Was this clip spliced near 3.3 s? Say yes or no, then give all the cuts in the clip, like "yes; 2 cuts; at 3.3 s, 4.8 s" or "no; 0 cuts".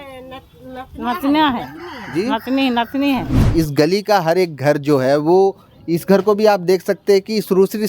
yes; 1 cut; at 3.3 s